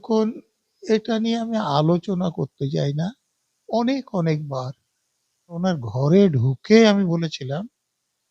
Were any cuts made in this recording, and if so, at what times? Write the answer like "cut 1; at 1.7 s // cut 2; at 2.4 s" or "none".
cut 1; at 5.6 s